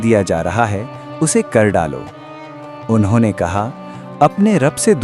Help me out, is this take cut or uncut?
uncut